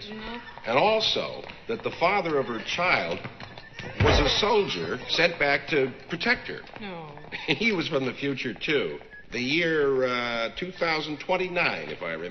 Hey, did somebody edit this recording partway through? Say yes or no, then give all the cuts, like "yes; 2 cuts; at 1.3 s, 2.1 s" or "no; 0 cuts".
yes; 1 cut; at 6.7 s